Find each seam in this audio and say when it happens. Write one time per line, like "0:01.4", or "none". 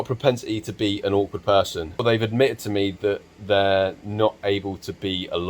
0:02.0